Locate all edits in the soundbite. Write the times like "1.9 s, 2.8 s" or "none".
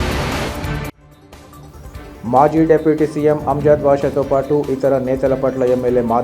1.0 s